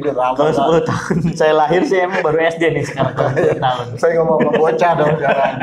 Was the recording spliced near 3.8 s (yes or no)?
yes